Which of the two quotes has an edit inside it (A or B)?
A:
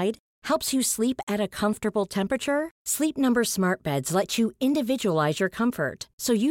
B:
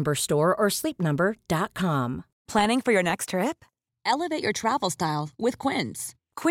B